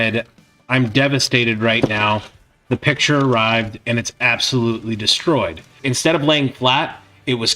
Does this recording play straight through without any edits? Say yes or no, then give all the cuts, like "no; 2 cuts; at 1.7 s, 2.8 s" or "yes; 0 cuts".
no; 1 cut; at 5.8 s